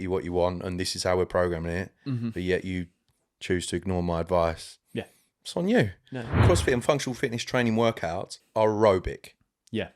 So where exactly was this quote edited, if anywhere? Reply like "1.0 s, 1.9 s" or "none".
6.4 s, 8.4 s

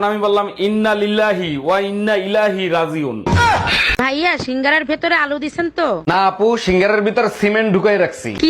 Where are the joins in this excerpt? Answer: 4.0 s

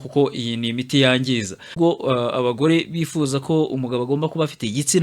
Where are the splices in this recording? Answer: 1.8 s

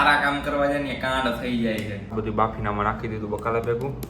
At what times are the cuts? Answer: 2.0 s

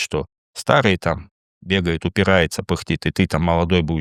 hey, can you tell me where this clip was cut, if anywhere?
none

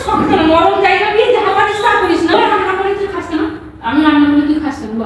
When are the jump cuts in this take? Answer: 2.3 s

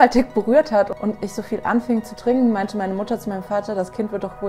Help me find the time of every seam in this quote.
0.9 s

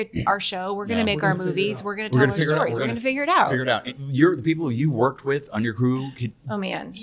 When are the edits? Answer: 3.9 s

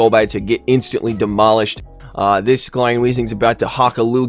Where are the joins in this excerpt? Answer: 1.8 s

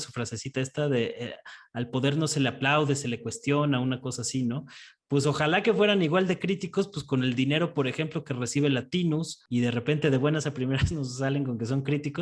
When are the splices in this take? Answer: 9.4 s

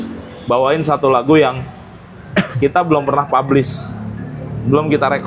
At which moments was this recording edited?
none

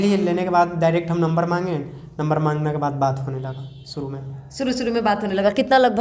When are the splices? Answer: none

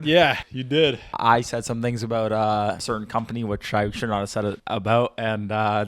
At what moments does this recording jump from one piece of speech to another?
0.9 s, 2.8 s, 4.6 s

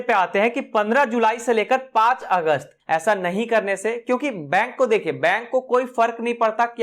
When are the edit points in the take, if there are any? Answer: 2.7 s

